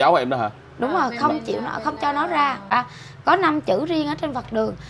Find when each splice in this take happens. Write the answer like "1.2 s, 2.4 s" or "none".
2.6 s